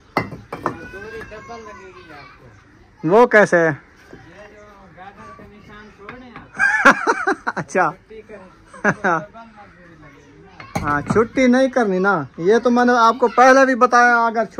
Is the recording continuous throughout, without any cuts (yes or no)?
yes